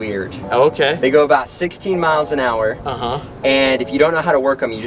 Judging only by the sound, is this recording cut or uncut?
uncut